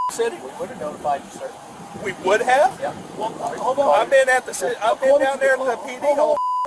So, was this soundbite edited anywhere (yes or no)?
no